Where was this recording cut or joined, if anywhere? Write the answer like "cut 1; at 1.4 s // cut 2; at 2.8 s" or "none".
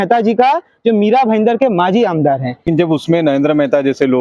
cut 1; at 2.7 s